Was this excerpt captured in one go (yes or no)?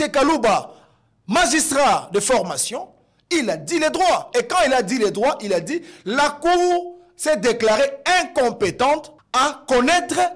no